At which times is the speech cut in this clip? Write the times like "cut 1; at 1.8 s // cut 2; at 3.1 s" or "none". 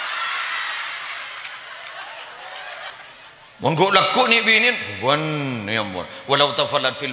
cut 1; at 2.9 s